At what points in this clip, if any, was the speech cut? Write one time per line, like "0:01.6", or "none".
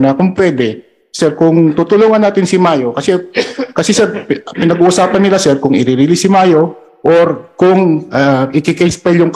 none